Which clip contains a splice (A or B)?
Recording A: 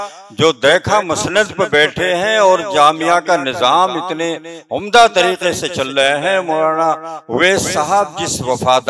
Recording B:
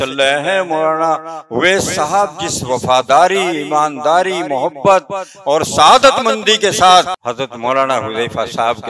B